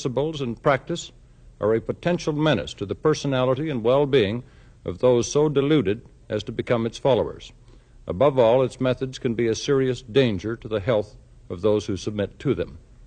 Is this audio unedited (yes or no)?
no